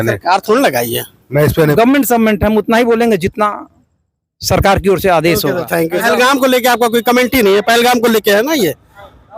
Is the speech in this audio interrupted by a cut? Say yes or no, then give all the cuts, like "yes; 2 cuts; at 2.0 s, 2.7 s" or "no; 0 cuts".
yes; 2 cuts; at 1.7 s, 6.0 s